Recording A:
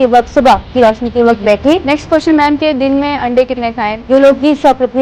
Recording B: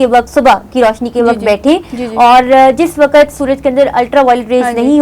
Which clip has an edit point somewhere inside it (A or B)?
A